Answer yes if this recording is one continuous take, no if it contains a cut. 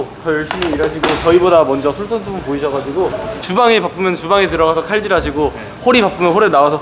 yes